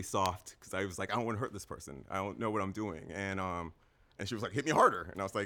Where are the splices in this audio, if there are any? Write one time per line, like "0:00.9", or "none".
none